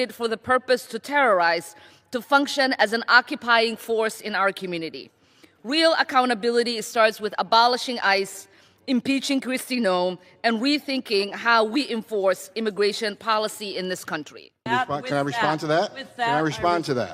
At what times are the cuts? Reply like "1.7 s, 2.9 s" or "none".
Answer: 14.7 s